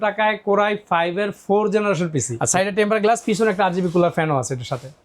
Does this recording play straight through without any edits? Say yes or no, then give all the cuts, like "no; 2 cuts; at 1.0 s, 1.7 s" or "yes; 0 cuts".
no; 1 cut; at 2.4 s